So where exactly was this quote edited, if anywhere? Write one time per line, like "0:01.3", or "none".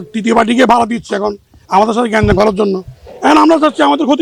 none